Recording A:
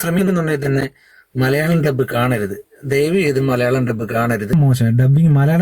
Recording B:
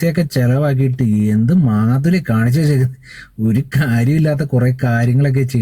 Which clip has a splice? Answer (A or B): A